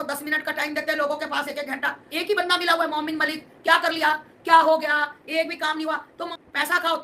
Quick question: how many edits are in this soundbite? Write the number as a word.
two